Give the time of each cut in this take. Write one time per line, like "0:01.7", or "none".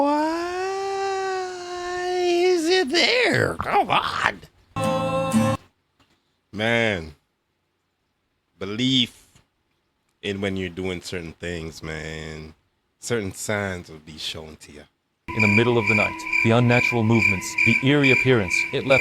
0:04.8
0:15.3